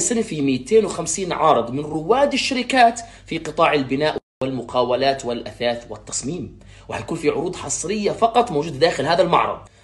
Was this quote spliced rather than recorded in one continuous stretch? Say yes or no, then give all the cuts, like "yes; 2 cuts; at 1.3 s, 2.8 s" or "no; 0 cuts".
no; 0 cuts